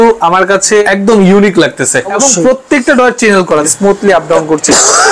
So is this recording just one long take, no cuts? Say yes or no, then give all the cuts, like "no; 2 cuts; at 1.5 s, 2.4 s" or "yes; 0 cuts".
no; 3 cuts; at 0.8 s, 2.2 s, 3.7 s